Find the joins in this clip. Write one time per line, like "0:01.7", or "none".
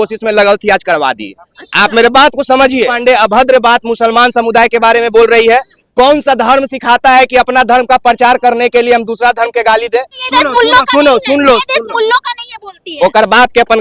0:03.0
0:10.2